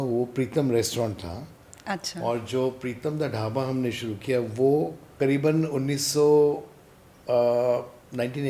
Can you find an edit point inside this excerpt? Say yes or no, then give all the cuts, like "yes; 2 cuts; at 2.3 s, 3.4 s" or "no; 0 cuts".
yes; 1 cut; at 5.0 s